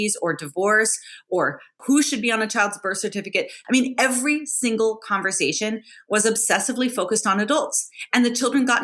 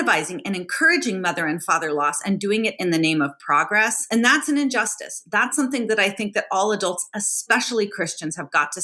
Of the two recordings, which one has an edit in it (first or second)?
first